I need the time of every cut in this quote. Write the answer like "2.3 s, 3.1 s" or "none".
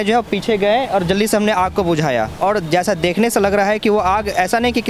2.4 s